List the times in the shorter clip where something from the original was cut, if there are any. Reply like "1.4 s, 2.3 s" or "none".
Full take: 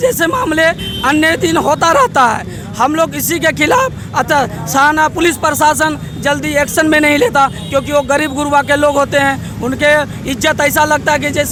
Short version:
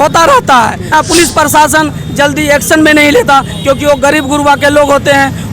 0.9 s